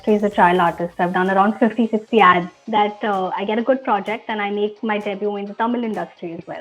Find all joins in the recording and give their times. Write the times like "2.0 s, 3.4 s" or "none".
2.6 s